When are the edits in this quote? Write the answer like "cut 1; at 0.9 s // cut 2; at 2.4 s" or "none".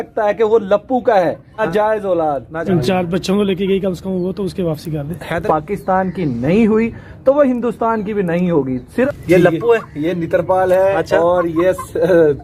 cut 1; at 1.5 s // cut 2; at 2.5 s // cut 3; at 5.4 s // cut 4; at 8.8 s